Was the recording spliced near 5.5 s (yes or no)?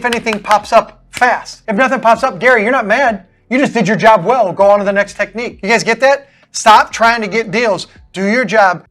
yes